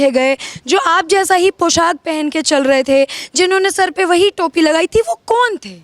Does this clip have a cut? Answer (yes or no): no